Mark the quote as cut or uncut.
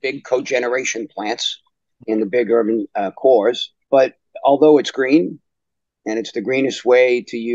cut